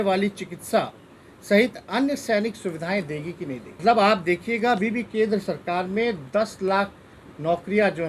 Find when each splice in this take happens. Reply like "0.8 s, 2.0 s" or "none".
3.8 s